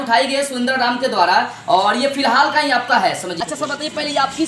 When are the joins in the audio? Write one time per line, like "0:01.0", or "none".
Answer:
0:03.3